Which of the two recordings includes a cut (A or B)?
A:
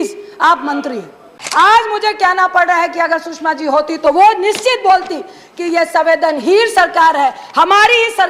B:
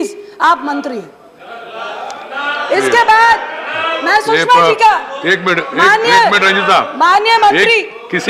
A